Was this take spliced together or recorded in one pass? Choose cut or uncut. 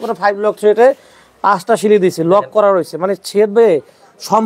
uncut